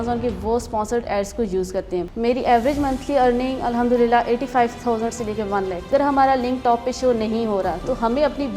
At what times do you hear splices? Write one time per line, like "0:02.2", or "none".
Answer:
0:02.1
0:05.9